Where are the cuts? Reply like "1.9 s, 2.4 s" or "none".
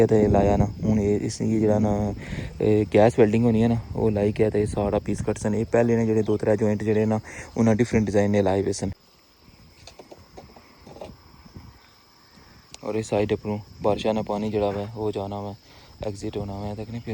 9.0 s